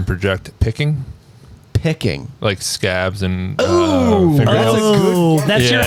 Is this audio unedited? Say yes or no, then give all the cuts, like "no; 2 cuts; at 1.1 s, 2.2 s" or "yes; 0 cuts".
yes; 0 cuts